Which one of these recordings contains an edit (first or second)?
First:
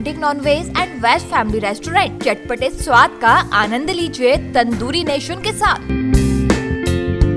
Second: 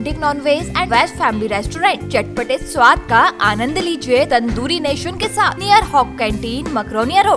second